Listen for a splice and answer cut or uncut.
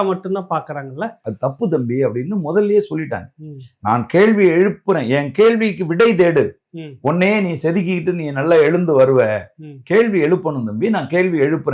cut